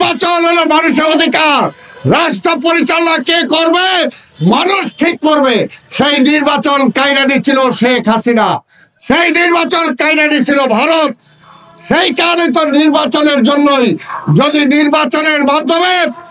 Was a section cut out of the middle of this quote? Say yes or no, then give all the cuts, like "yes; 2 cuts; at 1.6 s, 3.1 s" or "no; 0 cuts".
no; 0 cuts